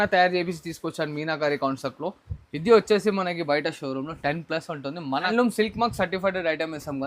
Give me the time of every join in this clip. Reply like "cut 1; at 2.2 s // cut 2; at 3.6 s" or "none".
cut 1; at 5.3 s